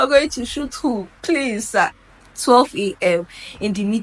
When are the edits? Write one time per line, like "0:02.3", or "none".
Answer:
0:02.1